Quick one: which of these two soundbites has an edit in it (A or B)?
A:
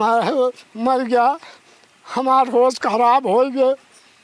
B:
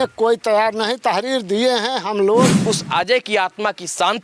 B